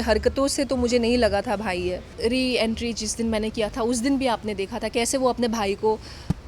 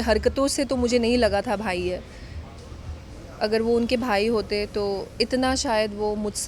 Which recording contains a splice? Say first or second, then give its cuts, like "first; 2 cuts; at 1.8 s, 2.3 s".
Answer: first; 1 cut; at 2.1 s